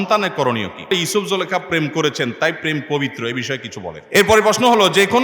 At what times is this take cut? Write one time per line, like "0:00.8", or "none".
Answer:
0:00.9
0:04.0